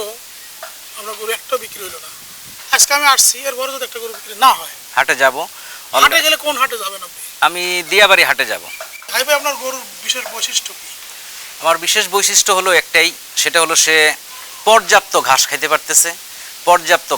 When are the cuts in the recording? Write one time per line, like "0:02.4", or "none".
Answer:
0:04.8
0:09.0